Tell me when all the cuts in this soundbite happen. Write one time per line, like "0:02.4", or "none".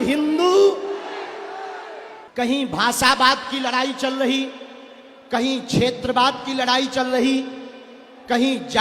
0:02.1